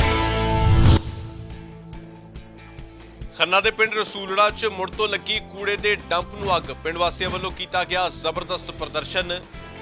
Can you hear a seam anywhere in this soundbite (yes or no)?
no